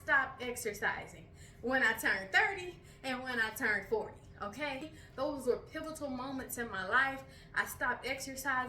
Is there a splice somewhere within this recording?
yes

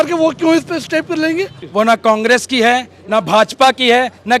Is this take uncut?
no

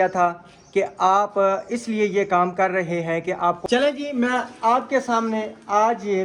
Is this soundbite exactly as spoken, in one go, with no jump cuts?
no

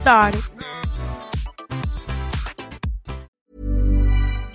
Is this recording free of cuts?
no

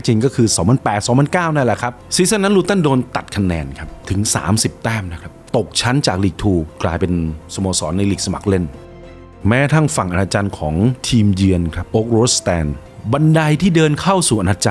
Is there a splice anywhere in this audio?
yes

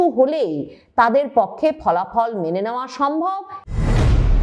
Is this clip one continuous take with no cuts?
no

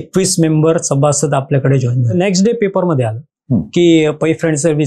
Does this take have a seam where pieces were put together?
yes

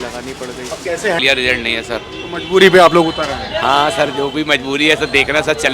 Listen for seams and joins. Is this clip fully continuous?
no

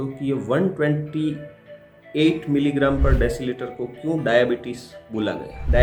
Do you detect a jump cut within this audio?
no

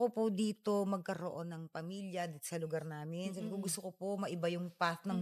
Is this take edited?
no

